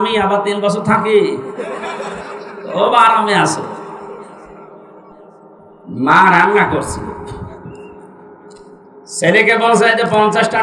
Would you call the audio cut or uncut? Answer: cut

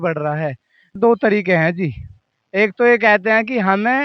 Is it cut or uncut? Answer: cut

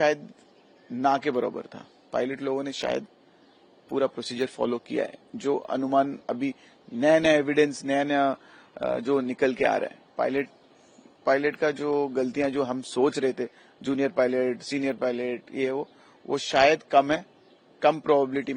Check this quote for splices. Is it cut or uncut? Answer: uncut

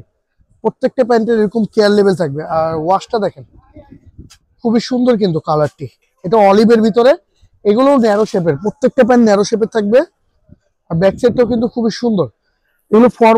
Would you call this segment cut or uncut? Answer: uncut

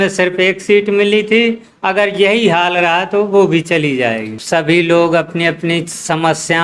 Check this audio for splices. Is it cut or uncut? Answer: cut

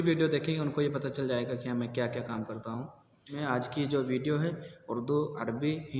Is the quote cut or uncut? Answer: cut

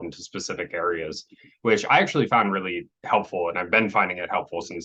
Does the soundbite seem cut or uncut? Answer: uncut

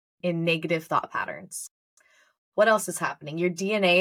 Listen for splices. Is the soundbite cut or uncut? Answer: uncut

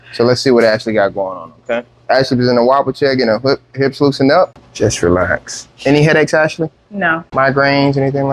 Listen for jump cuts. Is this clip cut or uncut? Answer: cut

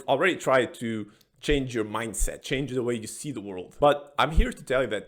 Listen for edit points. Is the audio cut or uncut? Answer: cut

